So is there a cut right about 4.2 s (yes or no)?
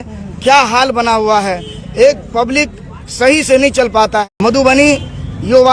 yes